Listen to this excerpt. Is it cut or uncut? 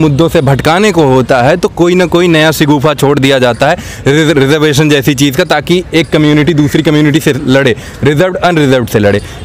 uncut